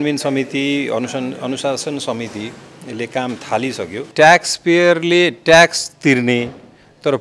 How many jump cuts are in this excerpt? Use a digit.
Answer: 1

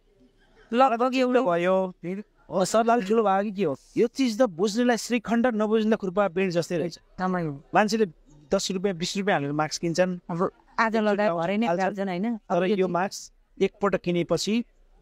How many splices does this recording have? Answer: 1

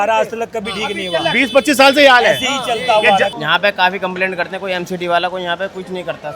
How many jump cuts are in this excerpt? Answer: 1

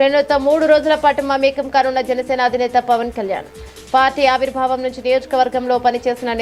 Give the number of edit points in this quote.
0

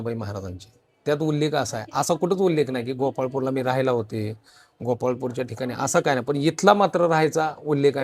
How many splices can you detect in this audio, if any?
0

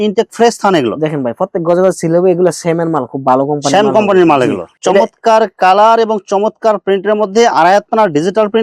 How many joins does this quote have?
1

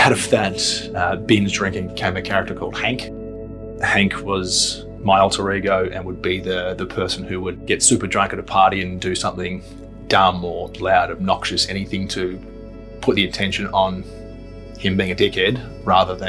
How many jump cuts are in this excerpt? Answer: 2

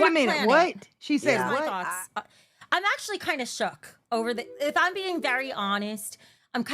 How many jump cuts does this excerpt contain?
1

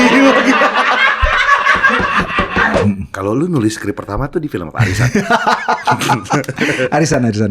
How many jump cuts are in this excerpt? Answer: 1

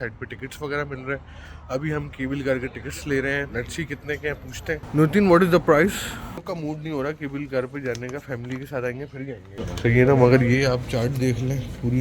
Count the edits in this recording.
0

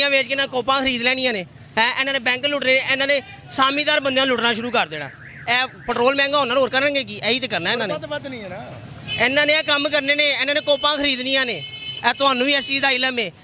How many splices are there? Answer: 0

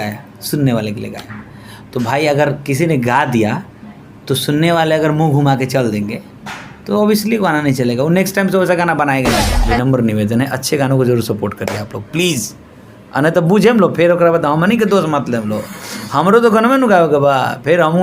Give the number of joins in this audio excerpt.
1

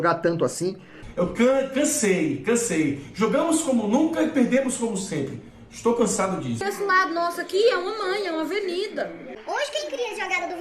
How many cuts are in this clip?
2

